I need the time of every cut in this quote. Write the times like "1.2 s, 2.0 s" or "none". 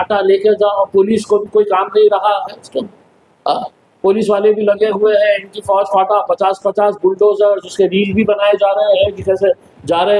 none